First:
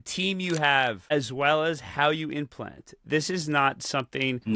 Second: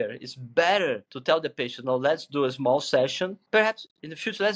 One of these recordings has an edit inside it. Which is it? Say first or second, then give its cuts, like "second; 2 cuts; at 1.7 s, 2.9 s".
second; 2 cuts; at 1.1 s, 3.4 s